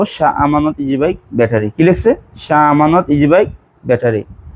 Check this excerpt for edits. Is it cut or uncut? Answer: uncut